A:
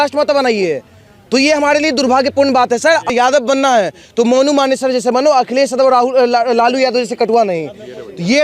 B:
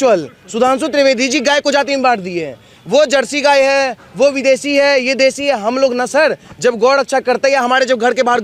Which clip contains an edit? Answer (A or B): A